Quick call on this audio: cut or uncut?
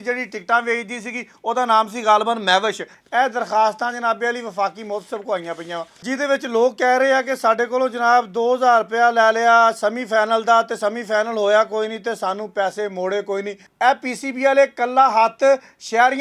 cut